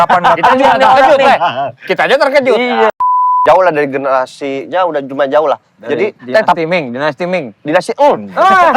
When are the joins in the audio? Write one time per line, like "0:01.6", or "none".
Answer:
0:03.4